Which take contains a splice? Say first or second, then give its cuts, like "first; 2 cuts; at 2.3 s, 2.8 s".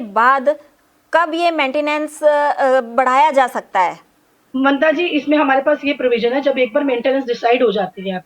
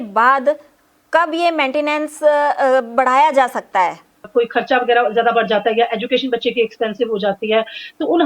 second; 1 cut; at 4.3 s